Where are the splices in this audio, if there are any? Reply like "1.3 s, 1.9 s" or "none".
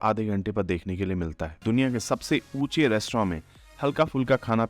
1.5 s

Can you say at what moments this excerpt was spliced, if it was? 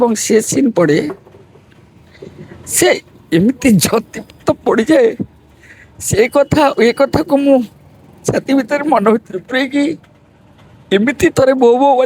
none

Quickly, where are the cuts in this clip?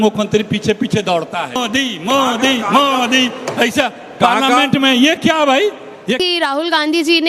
1.6 s, 6.2 s

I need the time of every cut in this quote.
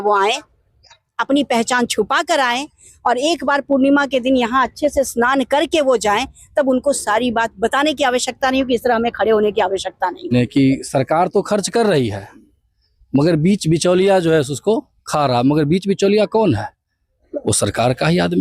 10.3 s

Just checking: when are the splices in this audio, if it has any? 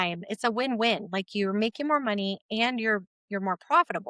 none

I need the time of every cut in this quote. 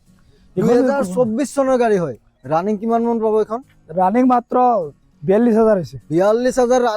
2.3 s

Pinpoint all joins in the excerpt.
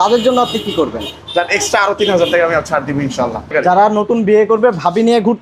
3.5 s

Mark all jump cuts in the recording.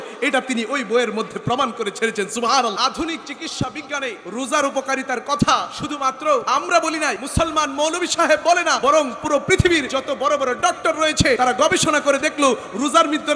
2.8 s, 4.2 s, 6.2 s, 7.2 s, 8.8 s, 9.9 s, 11.4 s

